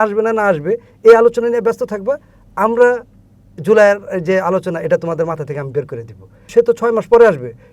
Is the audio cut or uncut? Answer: cut